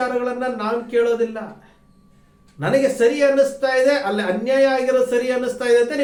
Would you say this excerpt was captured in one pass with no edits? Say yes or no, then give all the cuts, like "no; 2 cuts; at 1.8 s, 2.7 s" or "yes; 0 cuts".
yes; 0 cuts